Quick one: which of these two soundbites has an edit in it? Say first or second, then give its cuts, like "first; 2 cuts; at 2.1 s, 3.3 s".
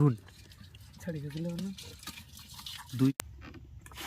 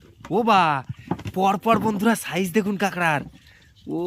first; 1 cut; at 3.1 s